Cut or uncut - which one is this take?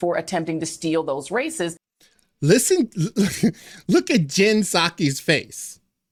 uncut